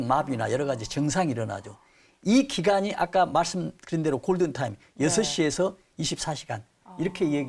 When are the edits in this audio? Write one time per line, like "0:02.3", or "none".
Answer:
none